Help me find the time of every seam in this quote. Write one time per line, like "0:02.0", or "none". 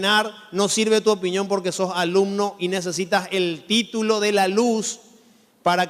0:02.0